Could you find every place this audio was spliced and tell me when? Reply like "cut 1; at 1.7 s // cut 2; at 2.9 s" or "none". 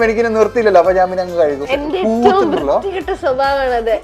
cut 1; at 1.6 s